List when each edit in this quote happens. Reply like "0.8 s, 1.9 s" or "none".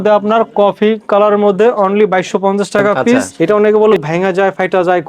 3.3 s